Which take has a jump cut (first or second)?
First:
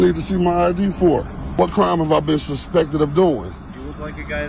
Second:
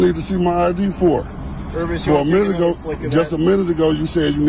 first